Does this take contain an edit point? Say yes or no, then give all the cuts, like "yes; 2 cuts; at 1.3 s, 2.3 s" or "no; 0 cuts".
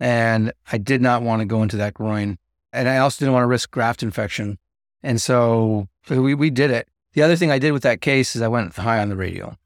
yes; 3 cuts; at 2.8 s, 3.7 s, 5.9 s